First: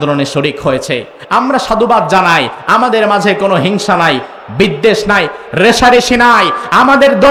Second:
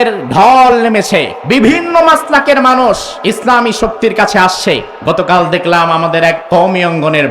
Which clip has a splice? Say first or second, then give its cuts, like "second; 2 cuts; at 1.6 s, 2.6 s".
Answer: second; 4 cuts; at 1.4 s, 3.1 s, 4.9 s, 6.4 s